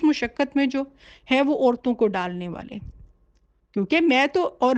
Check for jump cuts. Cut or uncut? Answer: uncut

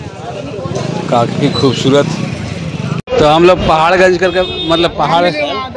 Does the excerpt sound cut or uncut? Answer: cut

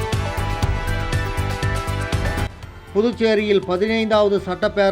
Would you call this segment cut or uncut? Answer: cut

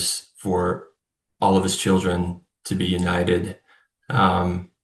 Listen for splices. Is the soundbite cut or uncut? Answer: uncut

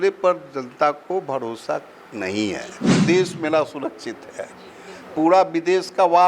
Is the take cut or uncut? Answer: cut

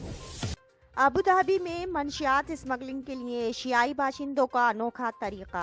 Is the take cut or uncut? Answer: cut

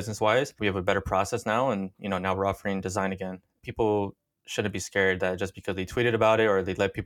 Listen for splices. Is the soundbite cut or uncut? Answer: uncut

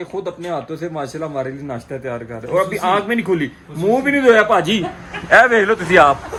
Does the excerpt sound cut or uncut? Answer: uncut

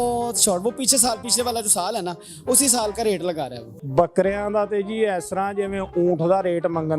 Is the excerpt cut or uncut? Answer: cut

